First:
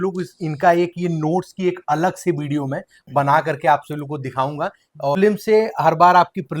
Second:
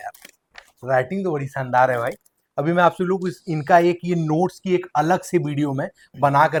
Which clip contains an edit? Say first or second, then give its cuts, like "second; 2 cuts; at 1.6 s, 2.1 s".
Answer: first; 1 cut; at 5.2 s